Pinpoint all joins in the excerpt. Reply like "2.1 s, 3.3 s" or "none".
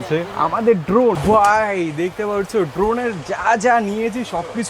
1.2 s